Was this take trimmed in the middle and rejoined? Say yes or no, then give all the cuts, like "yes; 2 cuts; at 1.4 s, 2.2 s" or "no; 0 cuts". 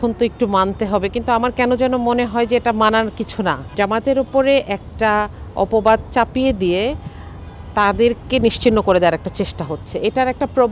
yes; 1 cut; at 3.6 s